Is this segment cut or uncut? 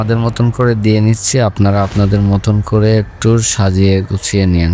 uncut